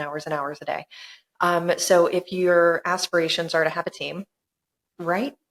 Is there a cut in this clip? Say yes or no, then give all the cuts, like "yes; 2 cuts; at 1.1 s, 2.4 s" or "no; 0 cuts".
no; 0 cuts